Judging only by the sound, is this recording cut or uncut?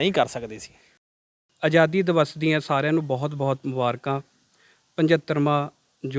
cut